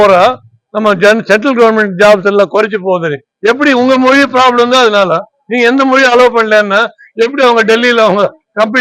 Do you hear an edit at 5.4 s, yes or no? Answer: no